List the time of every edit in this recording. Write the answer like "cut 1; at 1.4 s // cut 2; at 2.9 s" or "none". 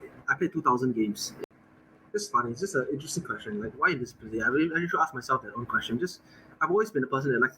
cut 1; at 1.3 s